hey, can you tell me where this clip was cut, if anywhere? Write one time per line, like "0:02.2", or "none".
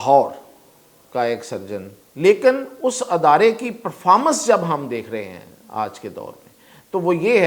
0:02.0